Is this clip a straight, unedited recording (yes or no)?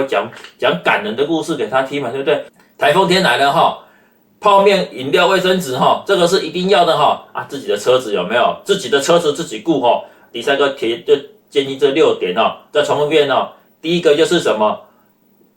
no